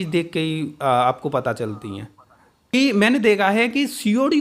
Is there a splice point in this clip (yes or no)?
yes